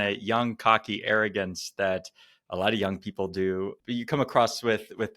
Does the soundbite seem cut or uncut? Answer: cut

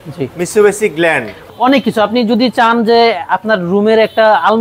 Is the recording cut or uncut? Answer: cut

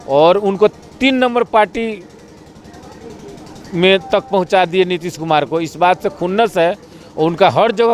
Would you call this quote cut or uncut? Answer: uncut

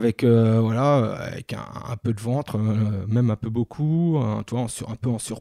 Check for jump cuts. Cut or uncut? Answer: uncut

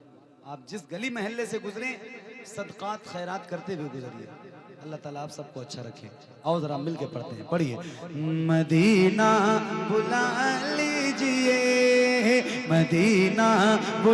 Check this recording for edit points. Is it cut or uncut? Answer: uncut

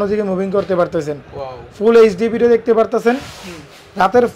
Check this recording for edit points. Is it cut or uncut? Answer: uncut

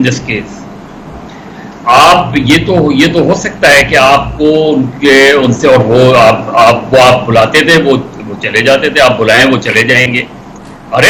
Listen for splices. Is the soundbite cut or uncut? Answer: uncut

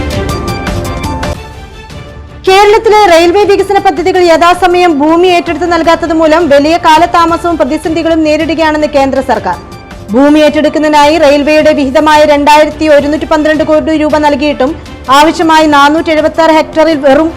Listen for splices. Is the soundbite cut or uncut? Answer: cut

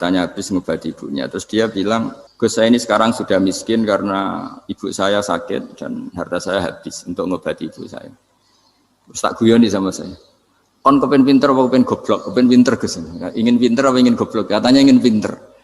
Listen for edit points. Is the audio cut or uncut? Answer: cut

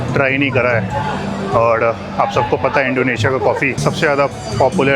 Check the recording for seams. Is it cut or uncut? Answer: cut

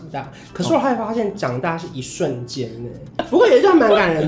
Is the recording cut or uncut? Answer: cut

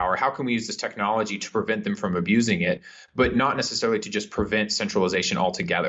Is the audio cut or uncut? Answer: uncut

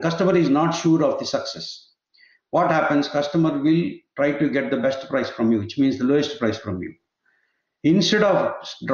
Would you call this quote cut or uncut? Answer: uncut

